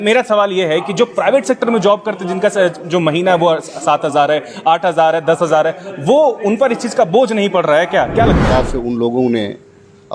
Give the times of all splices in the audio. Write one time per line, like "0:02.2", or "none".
0:08.4